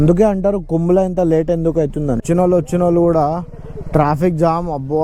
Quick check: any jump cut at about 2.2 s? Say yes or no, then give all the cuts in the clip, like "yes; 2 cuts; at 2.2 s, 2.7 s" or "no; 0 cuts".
yes; 1 cut; at 2.2 s